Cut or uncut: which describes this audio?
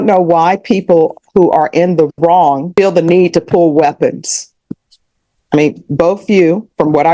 cut